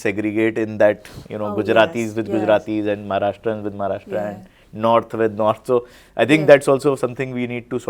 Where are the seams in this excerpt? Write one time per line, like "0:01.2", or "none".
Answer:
none

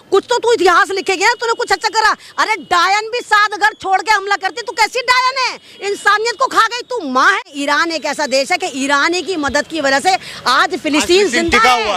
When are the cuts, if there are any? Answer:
0:07.5

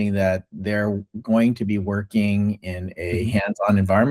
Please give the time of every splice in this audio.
none

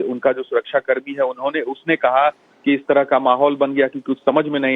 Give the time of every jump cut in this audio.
none

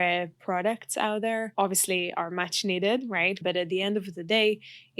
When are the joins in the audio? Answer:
0:01.5
0:03.4

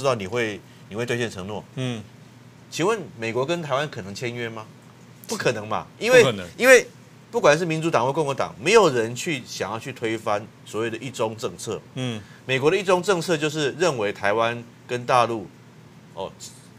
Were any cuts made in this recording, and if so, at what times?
none

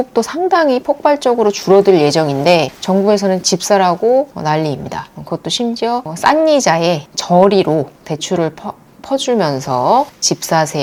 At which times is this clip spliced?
none

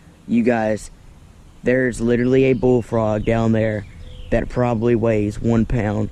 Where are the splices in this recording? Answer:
none

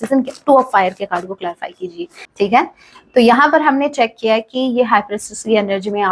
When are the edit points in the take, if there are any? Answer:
0:02.2

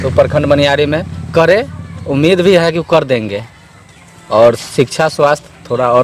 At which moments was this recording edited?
none

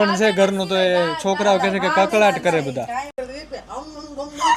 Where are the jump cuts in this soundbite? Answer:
0:03.1

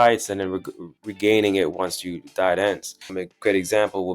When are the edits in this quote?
0:03.1

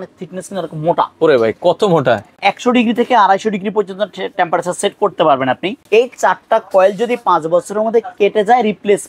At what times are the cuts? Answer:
0:02.3
0:05.8

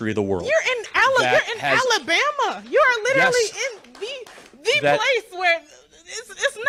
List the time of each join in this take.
none

